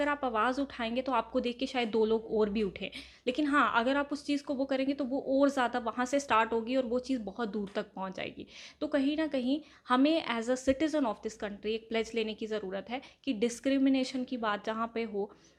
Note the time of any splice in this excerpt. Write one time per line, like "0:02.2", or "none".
none